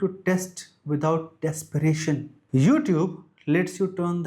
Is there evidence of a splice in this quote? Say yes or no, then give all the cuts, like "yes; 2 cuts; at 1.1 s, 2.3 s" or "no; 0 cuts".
yes; 1 cut; at 2.3 s